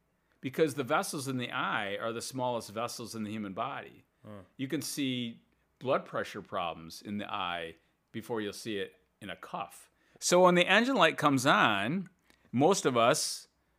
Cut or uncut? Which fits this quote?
cut